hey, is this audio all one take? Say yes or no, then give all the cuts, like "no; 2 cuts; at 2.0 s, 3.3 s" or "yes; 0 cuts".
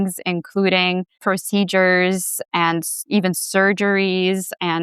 no; 1 cut; at 1.1 s